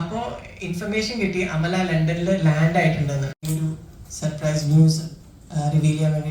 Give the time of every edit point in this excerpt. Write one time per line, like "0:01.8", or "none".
0:03.4

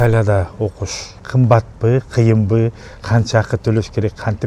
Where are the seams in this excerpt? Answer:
0:01.2

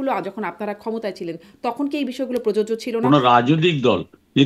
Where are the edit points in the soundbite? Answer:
0:03.0

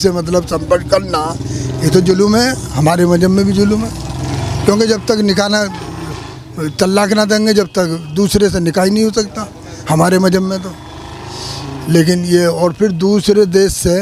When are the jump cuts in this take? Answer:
none

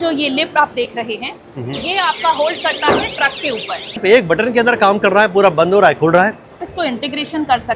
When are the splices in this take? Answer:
0:04.0
0:06.7

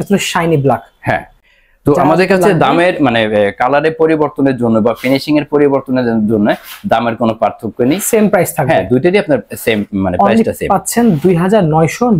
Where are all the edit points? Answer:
none

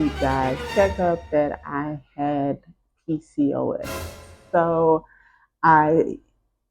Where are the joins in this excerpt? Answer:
0:04.3

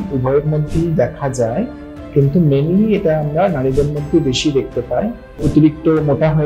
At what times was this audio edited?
0:05.4

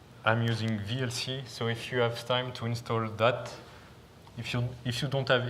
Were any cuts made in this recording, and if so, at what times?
0:03.3

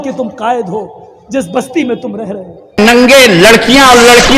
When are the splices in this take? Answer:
0:02.9

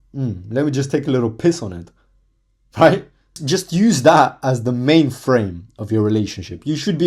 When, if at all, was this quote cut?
0:03.4

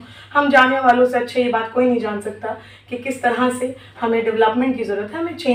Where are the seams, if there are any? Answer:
none

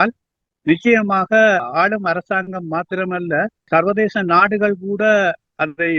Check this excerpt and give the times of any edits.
0:01.7
0:03.7

